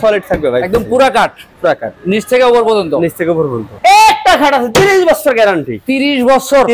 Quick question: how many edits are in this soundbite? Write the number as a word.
one